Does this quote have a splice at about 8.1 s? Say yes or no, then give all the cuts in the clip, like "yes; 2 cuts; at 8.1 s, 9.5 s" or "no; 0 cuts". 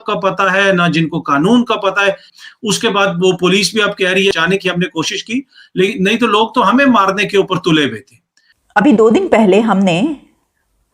no; 2 cuts; at 2.3 s, 4.3 s